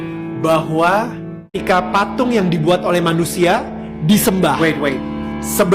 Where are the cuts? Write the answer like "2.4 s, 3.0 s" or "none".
1.6 s